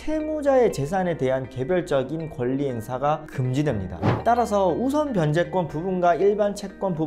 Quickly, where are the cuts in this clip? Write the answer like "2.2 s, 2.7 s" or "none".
3.9 s